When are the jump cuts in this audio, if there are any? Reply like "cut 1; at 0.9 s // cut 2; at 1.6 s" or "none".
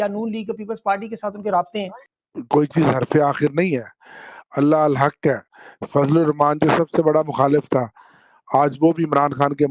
cut 1; at 1.9 s